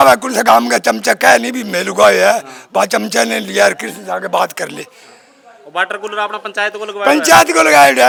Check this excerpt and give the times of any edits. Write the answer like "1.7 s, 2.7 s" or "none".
none